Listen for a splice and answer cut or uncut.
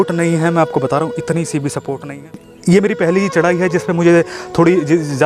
cut